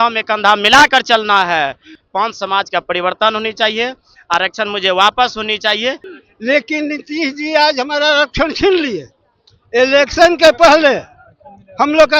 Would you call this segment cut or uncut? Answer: cut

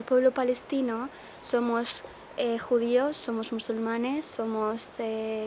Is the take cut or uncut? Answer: uncut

